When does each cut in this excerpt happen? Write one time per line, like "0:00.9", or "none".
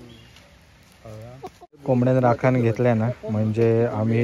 0:01.8